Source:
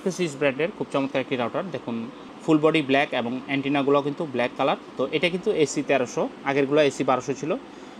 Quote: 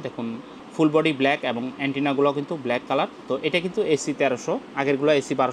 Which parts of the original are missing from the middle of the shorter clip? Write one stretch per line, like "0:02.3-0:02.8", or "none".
none